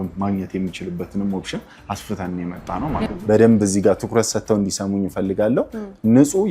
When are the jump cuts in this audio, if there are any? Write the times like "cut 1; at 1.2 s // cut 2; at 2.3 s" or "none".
cut 1; at 3.1 s